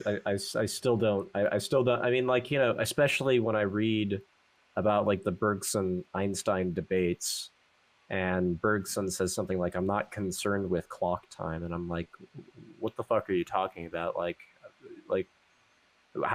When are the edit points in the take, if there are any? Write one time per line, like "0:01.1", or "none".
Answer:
none